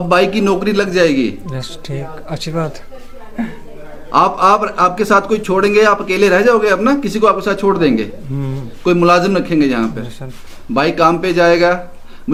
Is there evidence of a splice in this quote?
no; 0 cuts

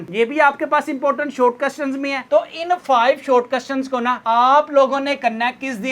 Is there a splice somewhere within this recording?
yes; 1 cut; at 2.2 s

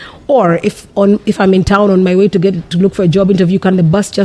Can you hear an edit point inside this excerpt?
no; 0 cuts

